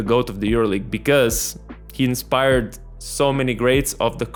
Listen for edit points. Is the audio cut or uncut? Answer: uncut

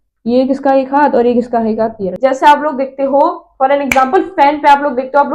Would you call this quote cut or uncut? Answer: cut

